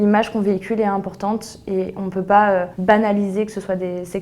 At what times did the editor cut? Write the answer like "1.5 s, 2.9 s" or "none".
2.7 s